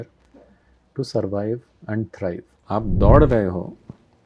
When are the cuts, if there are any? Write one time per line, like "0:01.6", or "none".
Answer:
0:02.5